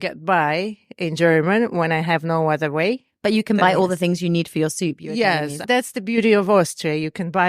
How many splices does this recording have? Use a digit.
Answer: 2